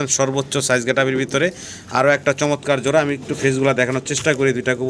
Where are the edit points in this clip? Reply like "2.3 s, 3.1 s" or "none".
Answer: none